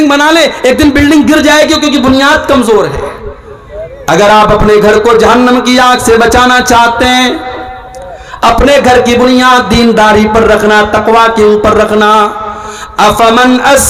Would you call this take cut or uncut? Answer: uncut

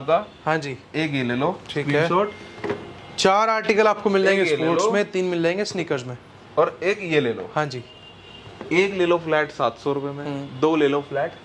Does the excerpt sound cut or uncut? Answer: uncut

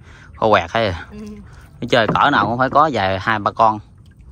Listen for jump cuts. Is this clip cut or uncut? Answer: uncut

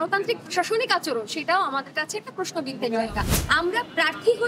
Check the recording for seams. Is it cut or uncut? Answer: cut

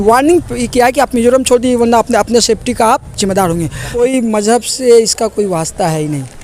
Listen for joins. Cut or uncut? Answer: cut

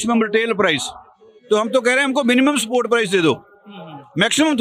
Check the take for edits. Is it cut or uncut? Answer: uncut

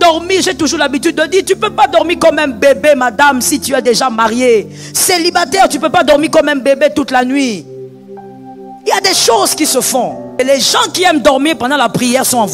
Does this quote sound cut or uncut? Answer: cut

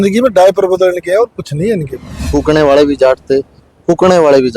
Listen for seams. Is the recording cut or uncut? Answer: cut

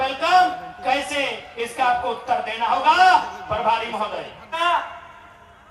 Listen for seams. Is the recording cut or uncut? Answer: cut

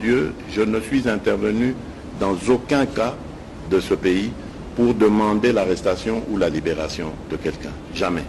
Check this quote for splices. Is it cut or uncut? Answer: uncut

